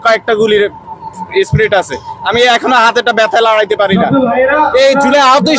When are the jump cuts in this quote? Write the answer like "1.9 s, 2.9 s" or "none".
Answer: none

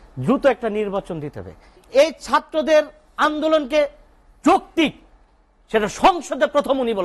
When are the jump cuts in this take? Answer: 1.8 s

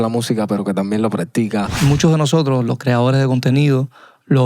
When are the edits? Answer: 1.7 s

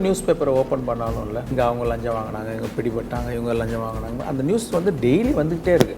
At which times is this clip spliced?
1.5 s

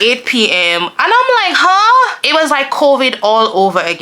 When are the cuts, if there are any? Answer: 2.2 s

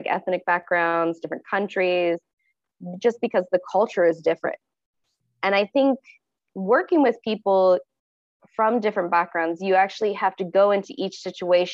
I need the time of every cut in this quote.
none

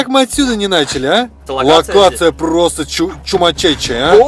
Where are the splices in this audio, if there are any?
1.4 s

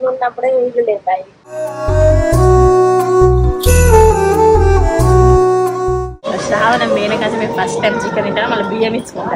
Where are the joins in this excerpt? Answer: 6.0 s

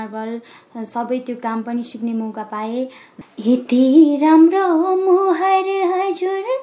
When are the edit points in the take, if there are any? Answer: 3.1 s

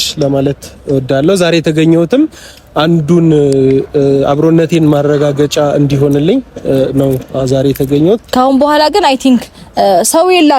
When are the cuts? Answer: 8.2 s

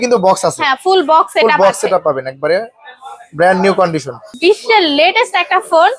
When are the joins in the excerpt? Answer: 4.3 s

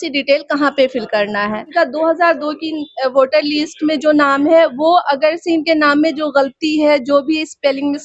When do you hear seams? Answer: 1.7 s

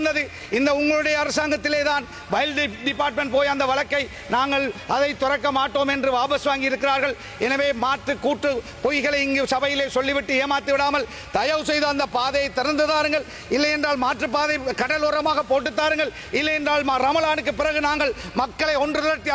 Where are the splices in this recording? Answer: none

